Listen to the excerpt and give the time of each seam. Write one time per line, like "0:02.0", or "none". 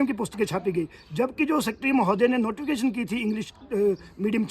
none

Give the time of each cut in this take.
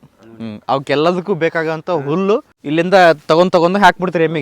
0:02.5

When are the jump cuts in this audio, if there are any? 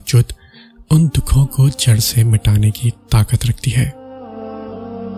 0:04.1

